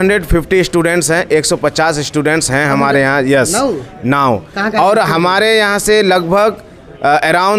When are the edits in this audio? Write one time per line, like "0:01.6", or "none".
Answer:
none